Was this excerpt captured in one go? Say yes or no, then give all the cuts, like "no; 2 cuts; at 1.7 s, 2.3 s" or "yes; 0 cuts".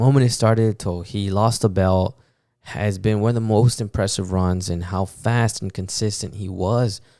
yes; 0 cuts